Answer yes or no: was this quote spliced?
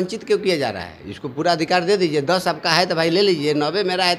no